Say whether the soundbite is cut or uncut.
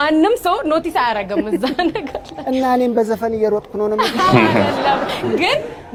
uncut